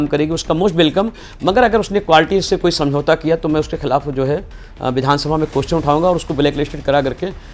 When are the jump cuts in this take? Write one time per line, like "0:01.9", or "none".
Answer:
none